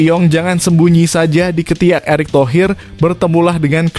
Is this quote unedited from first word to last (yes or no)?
yes